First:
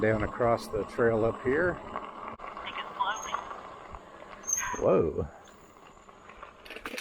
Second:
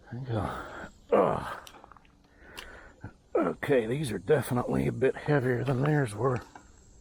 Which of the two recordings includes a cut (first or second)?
first